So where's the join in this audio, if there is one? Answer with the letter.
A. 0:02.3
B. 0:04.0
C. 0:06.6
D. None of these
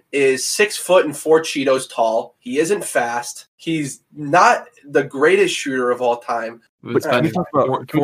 C